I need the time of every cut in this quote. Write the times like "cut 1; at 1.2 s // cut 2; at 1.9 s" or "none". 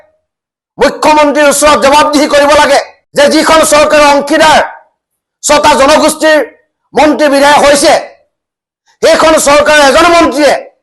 cut 1; at 3.0 s

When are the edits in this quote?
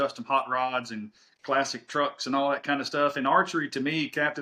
none

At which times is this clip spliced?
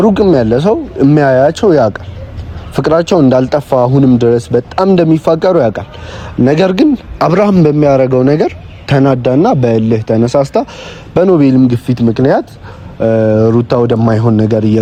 none

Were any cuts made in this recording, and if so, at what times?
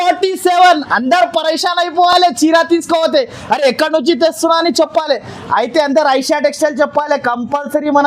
none

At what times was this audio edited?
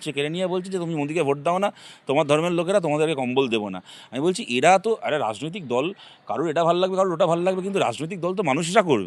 none

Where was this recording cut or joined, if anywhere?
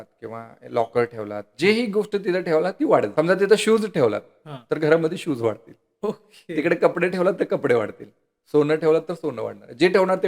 cut 1; at 3.1 s

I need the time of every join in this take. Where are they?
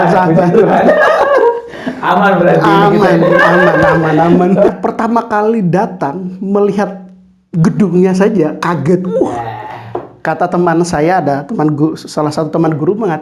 cut 1; at 4.7 s

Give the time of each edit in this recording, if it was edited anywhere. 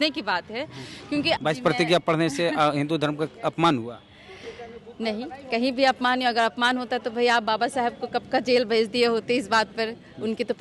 cut 1; at 1.4 s

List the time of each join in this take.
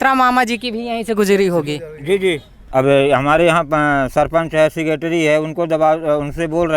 cut 1; at 2.5 s

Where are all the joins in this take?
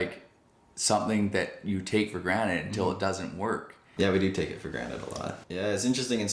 cut 1; at 3.9 s // cut 2; at 5.4 s

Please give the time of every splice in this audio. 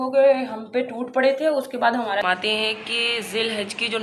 cut 1; at 2.2 s

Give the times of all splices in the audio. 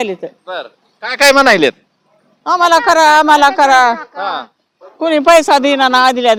none

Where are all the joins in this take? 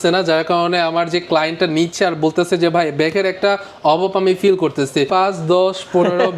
cut 1; at 5.1 s

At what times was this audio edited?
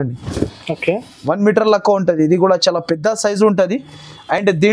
none

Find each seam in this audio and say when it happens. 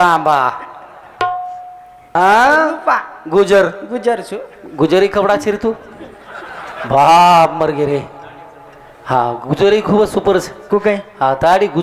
cut 1; at 2.1 s

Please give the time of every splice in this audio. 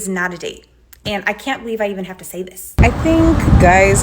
cut 1; at 2.8 s

